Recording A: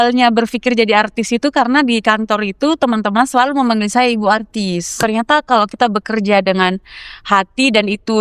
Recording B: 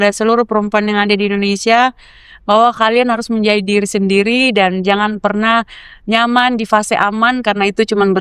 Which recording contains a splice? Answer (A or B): A